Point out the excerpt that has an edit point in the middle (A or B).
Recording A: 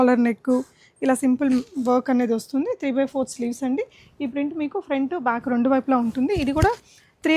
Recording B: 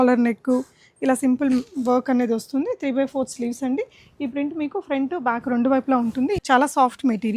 B